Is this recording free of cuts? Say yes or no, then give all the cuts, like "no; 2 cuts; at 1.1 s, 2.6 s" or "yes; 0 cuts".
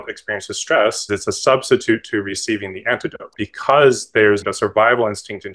no; 3 cuts; at 1.0 s, 3.3 s, 4.5 s